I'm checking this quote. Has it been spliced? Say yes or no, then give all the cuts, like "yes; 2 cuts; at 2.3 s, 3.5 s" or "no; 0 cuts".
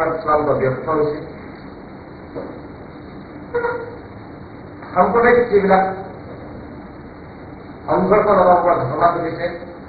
no; 0 cuts